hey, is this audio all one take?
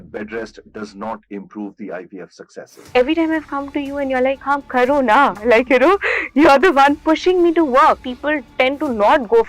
no; 3 cuts; at 2.9 s, 4.4 s, 8.0 s

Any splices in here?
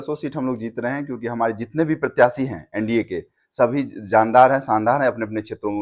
no; 0 cuts

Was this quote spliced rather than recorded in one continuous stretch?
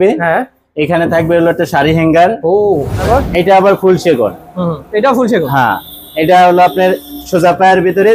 yes; 1 cut; at 3.0 s

